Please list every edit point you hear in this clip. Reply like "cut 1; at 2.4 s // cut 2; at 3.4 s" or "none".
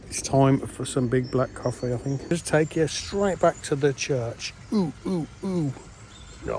cut 1; at 2.3 s